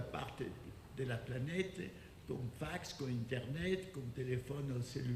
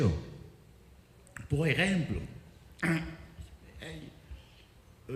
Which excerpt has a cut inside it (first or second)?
first